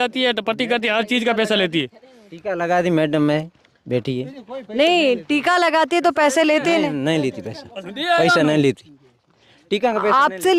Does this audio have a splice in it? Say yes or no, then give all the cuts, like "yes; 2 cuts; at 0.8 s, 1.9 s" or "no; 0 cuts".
no; 0 cuts